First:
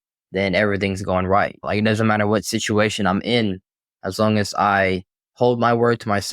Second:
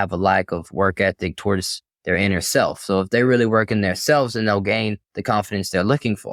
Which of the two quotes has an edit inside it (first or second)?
first